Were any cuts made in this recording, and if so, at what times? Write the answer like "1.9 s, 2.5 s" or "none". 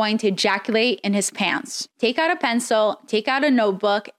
1.8 s